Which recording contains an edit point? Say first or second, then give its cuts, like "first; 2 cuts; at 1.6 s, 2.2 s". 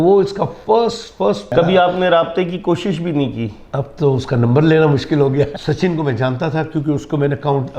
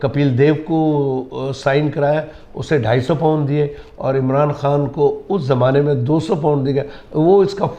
first; 2 cuts; at 1.5 s, 5.6 s